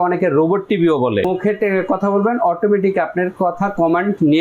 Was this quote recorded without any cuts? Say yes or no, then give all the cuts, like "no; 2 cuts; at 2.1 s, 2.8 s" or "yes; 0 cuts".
no; 1 cut; at 1.3 s